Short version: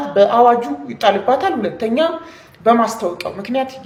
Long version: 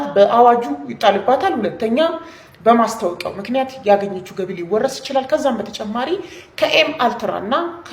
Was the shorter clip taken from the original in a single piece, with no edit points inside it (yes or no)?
yes